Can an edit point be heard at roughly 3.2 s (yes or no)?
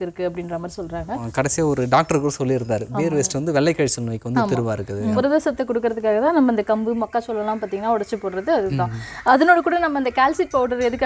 no